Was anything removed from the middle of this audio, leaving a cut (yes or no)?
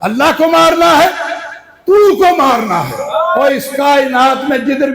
yes